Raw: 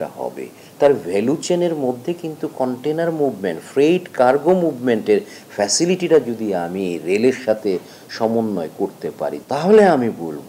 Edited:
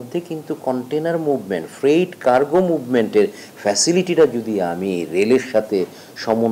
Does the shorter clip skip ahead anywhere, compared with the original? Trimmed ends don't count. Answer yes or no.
no